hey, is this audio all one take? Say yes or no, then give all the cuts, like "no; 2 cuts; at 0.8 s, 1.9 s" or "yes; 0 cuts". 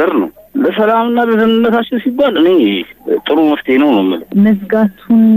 no; 1 cut; at 4.3 s